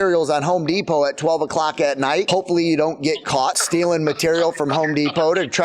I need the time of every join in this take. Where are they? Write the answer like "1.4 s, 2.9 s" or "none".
2.3 s, 3.6 s